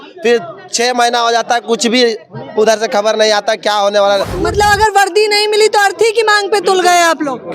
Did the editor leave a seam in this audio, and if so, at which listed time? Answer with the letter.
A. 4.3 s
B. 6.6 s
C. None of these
A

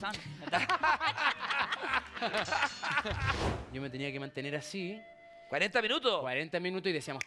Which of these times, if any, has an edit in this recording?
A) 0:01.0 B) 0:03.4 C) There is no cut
B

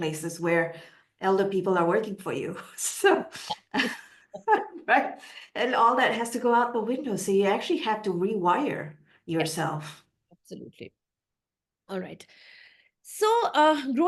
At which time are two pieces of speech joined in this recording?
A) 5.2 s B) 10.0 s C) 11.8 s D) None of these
D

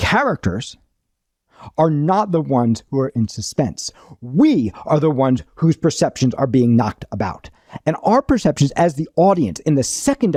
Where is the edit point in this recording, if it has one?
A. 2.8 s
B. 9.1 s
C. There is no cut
C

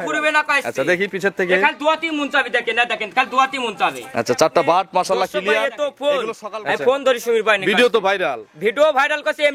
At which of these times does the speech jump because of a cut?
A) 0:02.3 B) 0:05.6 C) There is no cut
B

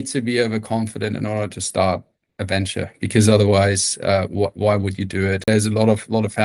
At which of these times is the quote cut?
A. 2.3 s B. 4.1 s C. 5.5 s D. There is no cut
C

